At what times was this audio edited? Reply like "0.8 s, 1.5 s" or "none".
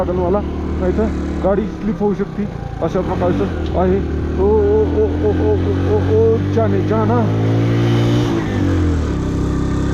none